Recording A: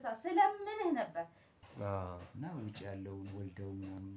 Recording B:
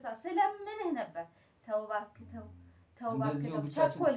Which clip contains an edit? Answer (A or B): A